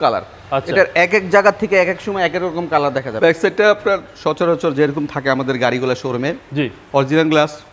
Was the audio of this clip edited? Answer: yes; 1 cut; at 3.1 s

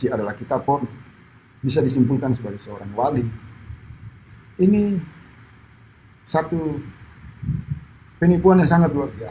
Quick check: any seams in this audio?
no; 0 cuts

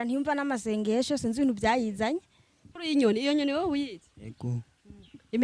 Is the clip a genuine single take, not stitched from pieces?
no; 1 cut; at 2.7 s

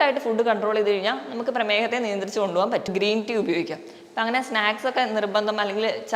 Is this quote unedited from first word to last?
no; 1 cut; at 2.9 s

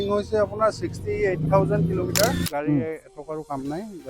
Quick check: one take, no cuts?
no; 1 cut; at 2.4 s

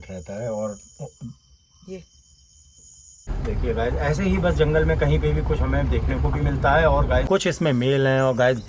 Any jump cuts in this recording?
yes; 2 cuts; at 3.3 s, 7.3 s

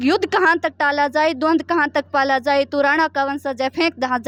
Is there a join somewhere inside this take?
no; 0 cuts

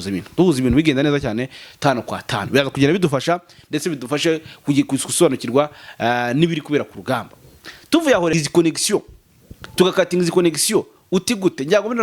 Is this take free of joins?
no; 1 cut; at 8.3 s

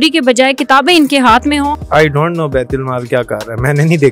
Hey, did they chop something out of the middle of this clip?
yes; 1 cut; at 1.8 s

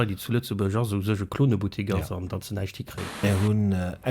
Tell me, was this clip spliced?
yes; 1 cut; at 3.2 s

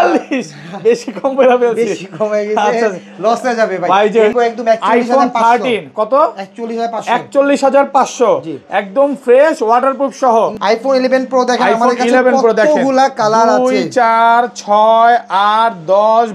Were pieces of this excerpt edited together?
yes; 2 cuts; at 4.3 s, 10.6 s

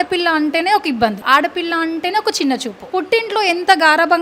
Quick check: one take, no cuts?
no; 2 cuts; at 1.2 s, 2.8 s

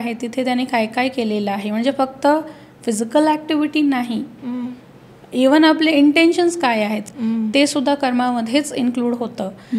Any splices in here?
yes; 1 cut; at 7.0 s

